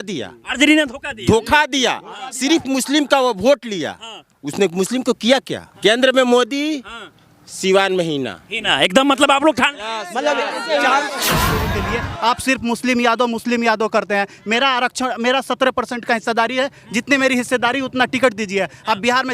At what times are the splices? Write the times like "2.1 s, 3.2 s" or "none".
5.6 s, 11.8 s